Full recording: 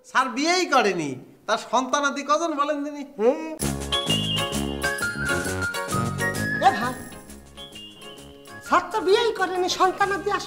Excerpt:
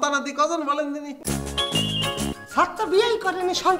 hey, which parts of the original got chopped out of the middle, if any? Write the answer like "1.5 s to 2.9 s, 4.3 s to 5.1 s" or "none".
3.1 s to 3.5 s, 4.7 s to 8.5 s